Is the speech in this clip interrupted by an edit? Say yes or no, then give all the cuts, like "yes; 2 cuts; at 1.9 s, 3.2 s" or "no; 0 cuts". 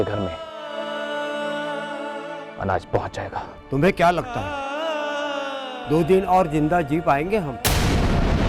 no; 0 cuts